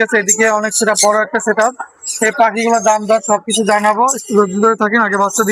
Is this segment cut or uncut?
uncut